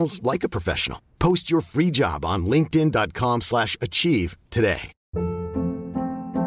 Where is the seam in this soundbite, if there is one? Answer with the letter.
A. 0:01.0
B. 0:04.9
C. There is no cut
B